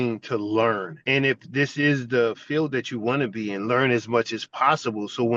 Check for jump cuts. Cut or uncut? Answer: cut